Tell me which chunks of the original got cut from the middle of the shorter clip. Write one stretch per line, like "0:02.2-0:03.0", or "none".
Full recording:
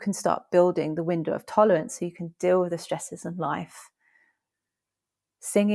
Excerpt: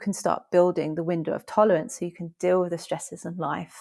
none

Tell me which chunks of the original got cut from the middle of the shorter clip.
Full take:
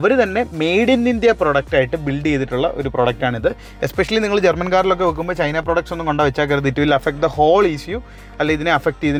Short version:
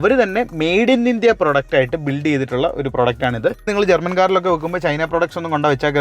0:03.7-0:04.2

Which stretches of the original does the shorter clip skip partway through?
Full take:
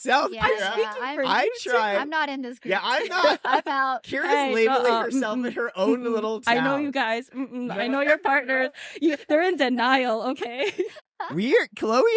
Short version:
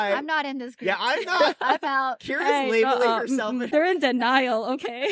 0:05.5-0:09.2

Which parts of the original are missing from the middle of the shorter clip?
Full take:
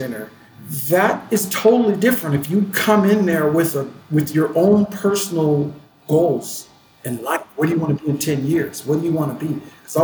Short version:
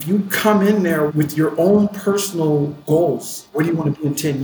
0:03.5-0:04.1
0:05.7-0:06.0
0:06.7-0:07.5

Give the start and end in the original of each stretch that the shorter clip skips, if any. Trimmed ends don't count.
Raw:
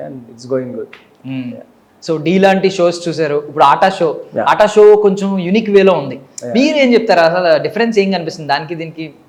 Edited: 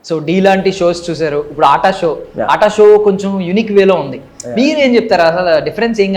none

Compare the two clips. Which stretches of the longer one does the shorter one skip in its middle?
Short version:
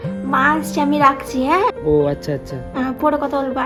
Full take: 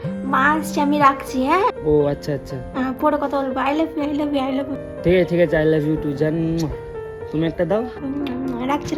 none

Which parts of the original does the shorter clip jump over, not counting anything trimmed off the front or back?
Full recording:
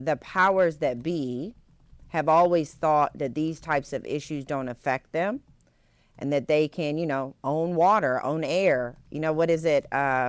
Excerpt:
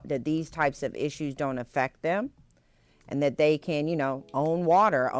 none

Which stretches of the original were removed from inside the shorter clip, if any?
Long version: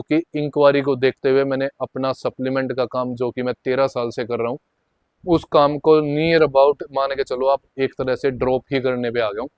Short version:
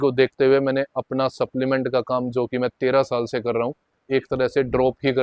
0:04.8-0:07.7

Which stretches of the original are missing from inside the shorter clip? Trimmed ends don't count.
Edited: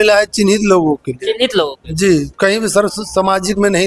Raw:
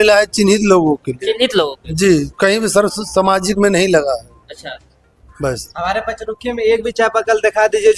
none

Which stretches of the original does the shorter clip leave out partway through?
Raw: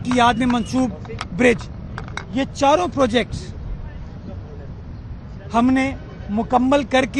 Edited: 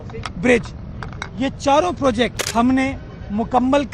0:03.4-0:05.4

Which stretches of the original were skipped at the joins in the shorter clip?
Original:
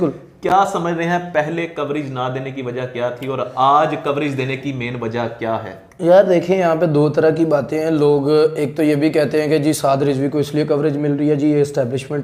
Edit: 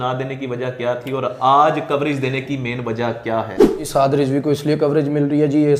0:06.0-0:09.7

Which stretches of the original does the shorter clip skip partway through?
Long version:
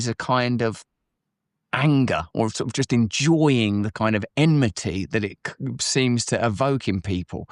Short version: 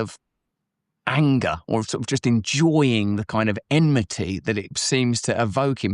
0:05.4-0:05.8

